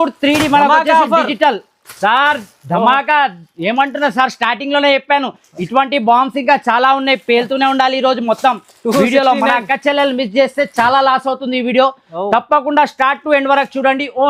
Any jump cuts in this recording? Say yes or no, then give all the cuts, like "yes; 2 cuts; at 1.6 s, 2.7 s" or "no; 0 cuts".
no; 0 cuts